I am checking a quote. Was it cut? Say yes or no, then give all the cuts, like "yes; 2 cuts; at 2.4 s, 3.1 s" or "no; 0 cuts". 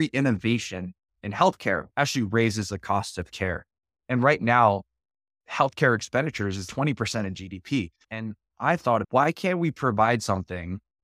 yes; 2 cuts; at 1.8 s, 8.0 s